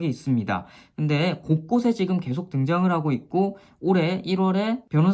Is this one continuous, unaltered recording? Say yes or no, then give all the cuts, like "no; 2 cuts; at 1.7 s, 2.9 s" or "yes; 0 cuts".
yes; 0 cuts